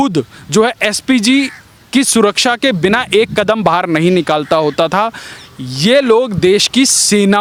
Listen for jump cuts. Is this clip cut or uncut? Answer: uncut